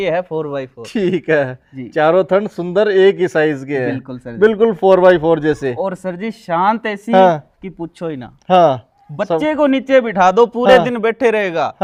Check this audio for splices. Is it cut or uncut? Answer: uncut